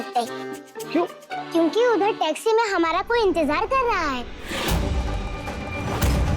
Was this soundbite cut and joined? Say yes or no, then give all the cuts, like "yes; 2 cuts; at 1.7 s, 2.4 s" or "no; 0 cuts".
yes; 1 cut; at 4.4 s